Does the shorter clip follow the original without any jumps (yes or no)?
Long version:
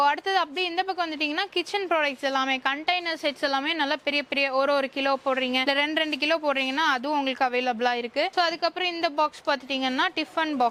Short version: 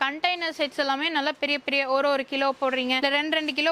yes